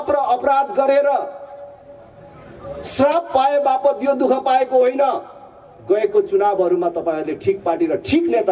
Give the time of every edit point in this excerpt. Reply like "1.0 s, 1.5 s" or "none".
none